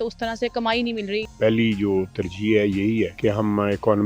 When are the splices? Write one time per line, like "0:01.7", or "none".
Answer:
0:01.3
0:03.1

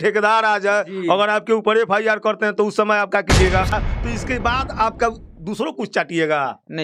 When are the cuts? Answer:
0:03.7

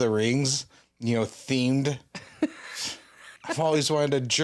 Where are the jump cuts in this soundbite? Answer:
0:03.4

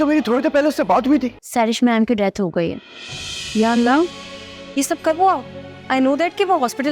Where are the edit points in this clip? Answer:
0:01.4

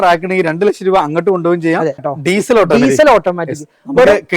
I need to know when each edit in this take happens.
0:02.1

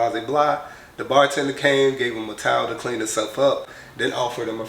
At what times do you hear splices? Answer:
0:03.7

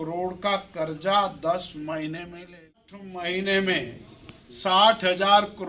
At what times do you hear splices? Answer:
0:02.8

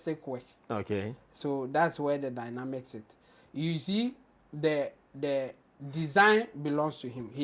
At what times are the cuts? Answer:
none

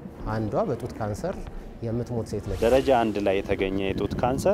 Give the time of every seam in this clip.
0:02.5

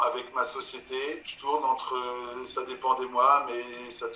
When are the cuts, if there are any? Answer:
0:01.3

